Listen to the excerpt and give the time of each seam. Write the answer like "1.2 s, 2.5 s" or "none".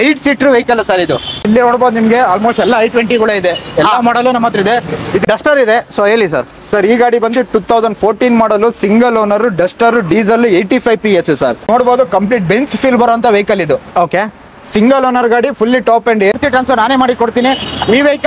1.4 s, 5.2 s, 11.7 s, 16.3 s